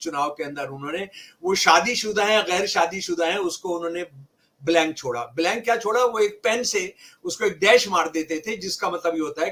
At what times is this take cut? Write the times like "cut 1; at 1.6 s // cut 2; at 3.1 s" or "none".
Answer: none